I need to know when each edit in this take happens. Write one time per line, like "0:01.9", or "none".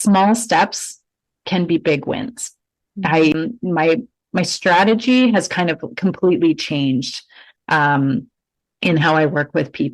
0:03.3